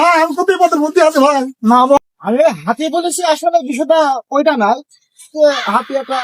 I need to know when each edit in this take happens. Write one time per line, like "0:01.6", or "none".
0:02.0